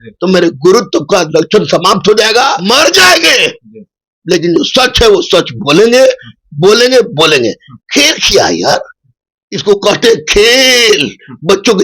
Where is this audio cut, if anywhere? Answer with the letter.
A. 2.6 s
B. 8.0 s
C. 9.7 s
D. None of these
A